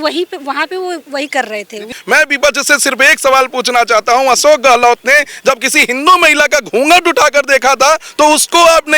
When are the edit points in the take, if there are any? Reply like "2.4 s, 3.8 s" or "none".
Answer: 1.9 s